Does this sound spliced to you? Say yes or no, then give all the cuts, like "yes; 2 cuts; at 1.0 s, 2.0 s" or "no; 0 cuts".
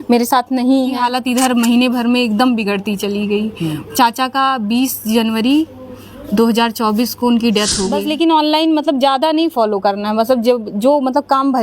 yes; 2 cuts; at 1.0 s, 8.0 s